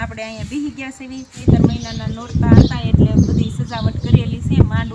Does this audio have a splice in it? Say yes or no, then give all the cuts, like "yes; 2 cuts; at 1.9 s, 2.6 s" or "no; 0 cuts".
yes; 1 cut; at 1.4 s